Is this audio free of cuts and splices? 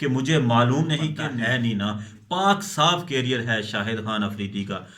no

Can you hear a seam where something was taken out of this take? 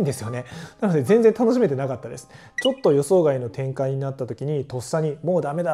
yes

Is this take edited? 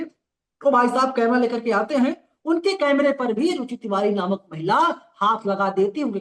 no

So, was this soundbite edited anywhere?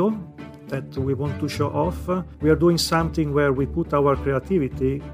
no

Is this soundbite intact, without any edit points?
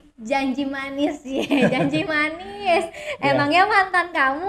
yes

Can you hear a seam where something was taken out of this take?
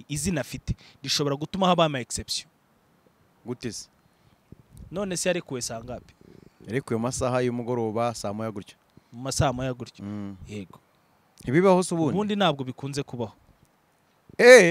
no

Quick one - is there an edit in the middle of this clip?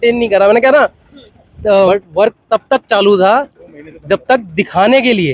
yes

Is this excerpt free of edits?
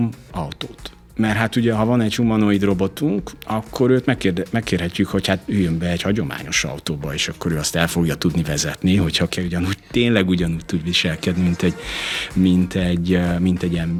yes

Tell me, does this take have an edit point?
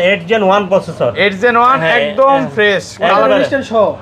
no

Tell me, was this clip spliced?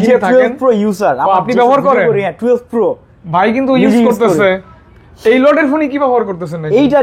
no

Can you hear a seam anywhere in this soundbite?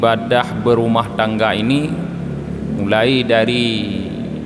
no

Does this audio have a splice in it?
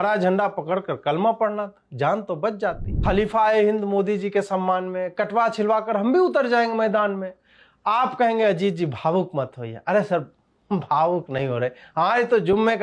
yes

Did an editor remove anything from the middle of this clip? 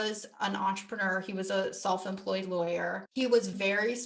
no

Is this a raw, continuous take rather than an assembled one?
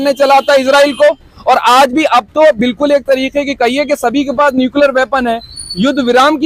yes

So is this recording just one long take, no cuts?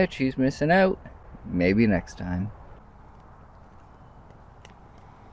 no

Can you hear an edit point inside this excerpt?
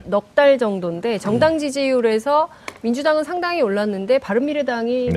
no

